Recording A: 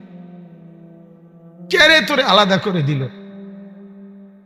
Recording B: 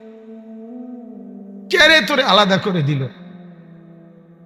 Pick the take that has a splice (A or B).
A